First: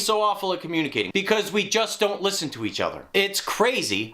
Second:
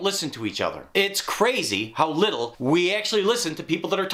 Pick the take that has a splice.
first; 1 cut; at 1.1 s

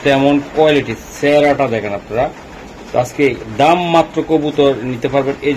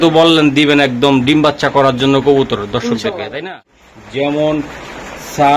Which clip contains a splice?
second; 1 cut; at 3.7 s

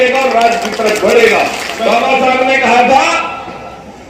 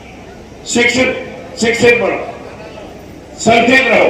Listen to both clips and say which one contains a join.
first; 1 cut; at 1.7 s

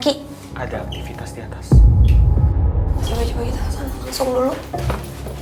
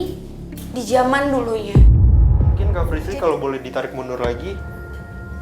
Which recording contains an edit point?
second; 1 cut; at 2.7 s

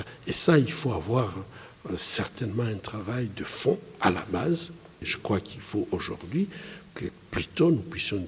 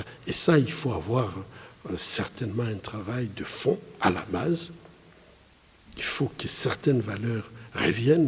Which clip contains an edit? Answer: first; 1 cut; at 5.1 s

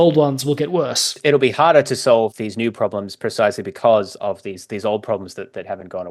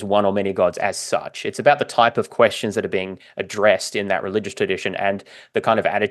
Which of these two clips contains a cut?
first; 2 cuts; at 1.2 s, 2.3 s

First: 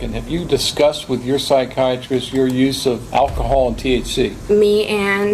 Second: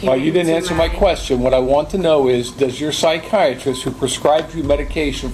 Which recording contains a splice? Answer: first; 2 cuts; at 3.0 s, 4.4 s

